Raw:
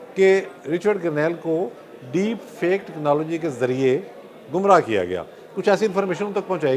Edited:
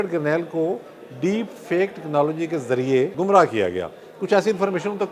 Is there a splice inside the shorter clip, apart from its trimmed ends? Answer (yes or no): yes